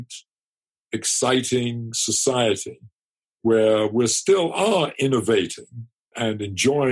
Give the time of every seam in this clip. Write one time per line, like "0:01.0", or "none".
0:06.0